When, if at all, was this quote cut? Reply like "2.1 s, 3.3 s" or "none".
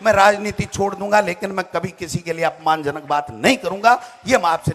none

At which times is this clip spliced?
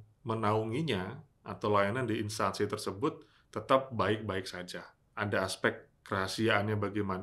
5.0 s

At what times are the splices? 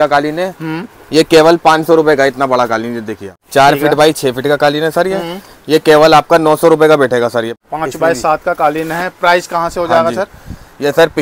3.4 s, 7.6 s

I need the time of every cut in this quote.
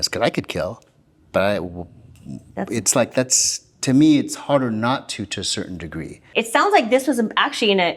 6.3 s

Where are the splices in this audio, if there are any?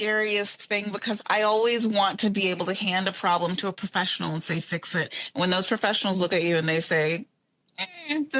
1.2 s

